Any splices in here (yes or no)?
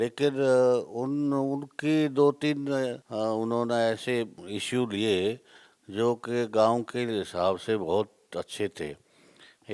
yes